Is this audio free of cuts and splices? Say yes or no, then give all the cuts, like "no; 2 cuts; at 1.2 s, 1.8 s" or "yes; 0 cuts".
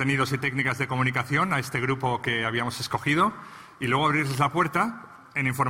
no; 1 cut; at 3.4 s